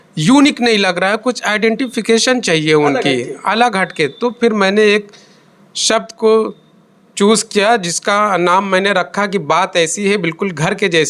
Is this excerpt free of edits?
yes; 0 cuts

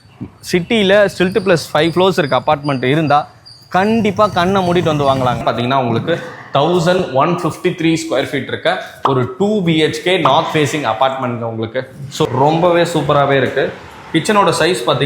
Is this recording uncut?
no; 2 cuts; at 5.4 s, 12.3 s

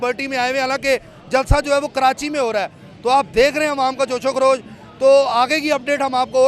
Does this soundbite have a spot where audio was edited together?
no; 0 cuts

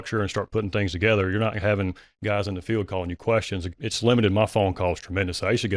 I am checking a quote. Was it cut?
yes; 1 cut; at 2.1 s

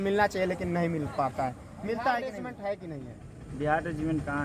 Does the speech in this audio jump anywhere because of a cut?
yes; 1 cut; at 2.5 s

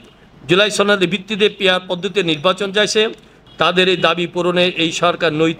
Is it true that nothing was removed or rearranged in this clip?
no; 1 cut; at 3.3 s

